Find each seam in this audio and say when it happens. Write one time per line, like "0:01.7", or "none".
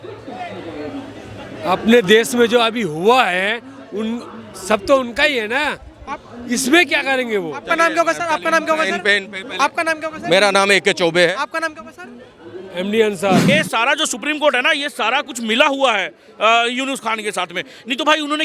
0:13.4